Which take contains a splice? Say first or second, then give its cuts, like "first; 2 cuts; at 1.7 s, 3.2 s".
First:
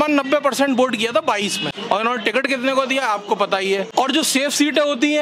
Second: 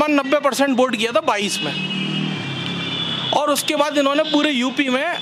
first; 2 cuts; at 1.7 s, 3.9 s